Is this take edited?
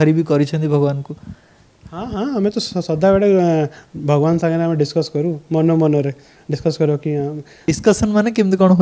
yes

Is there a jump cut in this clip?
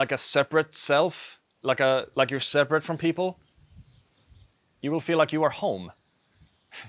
no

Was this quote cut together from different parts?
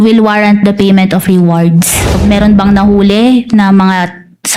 yes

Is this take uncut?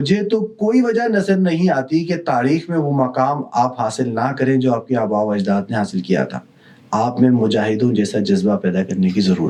yes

